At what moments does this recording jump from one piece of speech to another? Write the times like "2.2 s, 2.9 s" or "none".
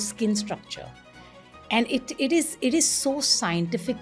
none